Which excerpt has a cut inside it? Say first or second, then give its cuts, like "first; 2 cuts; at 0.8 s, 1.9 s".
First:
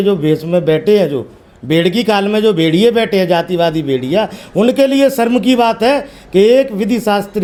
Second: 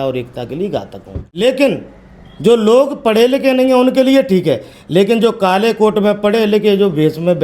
second; 1 cut; at 1.4 s